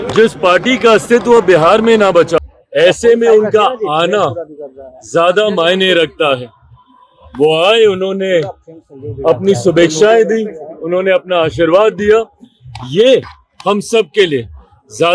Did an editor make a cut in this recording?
yes; 2 cuts; at 1.6 s, 2.4 s

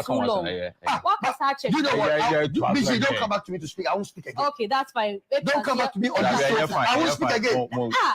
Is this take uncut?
no; 1 cut; at 5.8 s

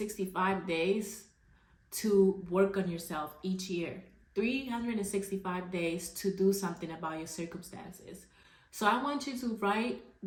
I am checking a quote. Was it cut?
no; 0 cuts

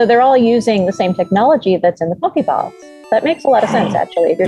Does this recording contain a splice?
no; 0 cuts

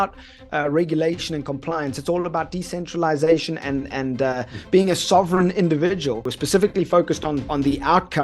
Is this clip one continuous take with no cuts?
no; 2 cuts; at 6.3 s, 7.5 s

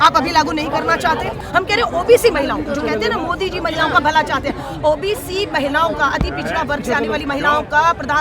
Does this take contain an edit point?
yes; 1 cut; at 1.4 s

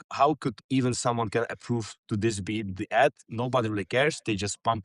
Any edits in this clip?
no; 0 cuts

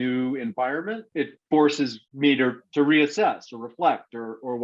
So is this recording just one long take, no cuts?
yes; 0 cuts

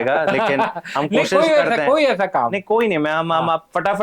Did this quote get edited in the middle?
no; 0 cuts

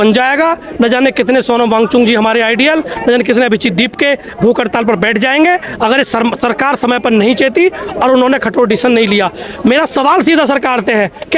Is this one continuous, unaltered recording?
yes; 0 cuts

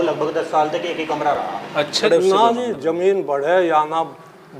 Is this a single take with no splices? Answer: no; 1 cut; at 2.0 s

